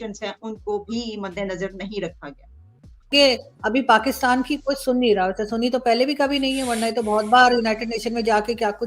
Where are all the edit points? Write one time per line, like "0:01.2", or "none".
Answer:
0:03.1